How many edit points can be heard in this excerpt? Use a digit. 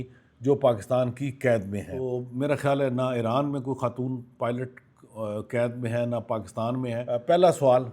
2